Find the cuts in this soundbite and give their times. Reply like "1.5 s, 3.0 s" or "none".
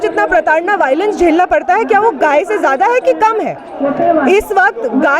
none